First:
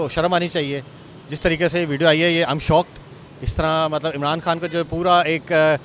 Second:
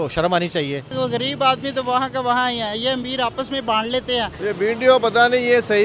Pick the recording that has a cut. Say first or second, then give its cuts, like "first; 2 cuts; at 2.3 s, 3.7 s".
second; 2 cuts; at 0.9 s, 4.3 s